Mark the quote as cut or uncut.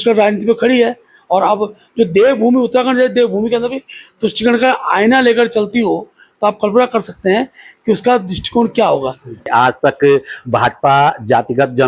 cut